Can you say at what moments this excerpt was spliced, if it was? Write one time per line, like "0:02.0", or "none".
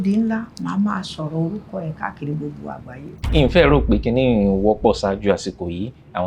0:03.2